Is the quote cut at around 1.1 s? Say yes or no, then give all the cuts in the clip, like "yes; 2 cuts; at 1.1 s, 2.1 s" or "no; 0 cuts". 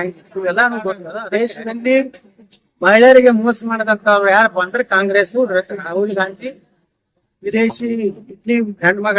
yes; 1 cut; at 1.1 s